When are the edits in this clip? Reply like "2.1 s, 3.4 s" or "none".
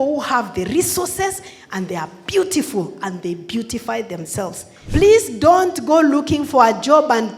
4.7 s